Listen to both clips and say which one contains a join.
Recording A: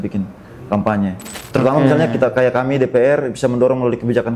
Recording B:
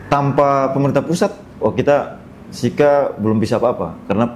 A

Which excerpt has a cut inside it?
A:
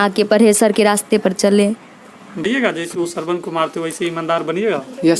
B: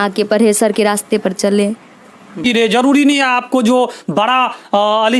B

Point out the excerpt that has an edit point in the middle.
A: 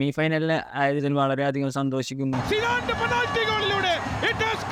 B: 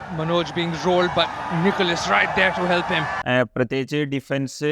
B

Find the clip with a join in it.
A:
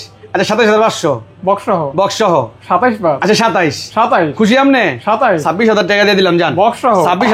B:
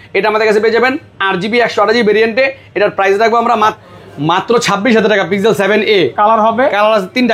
B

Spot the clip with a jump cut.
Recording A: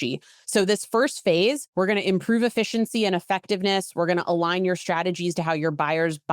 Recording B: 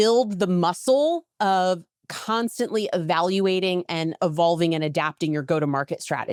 A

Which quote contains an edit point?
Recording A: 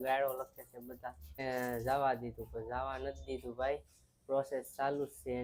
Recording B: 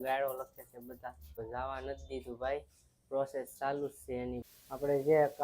B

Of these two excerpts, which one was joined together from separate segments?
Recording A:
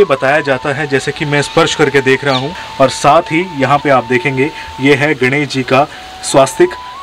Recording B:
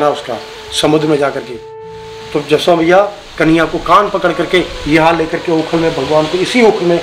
A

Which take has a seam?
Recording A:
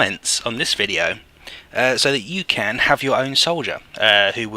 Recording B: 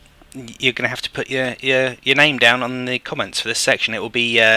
A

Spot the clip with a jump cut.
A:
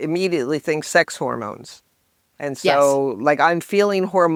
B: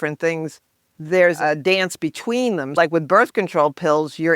B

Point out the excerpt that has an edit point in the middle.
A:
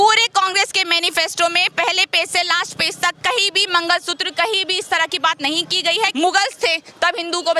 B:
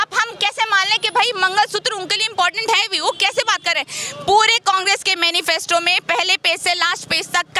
A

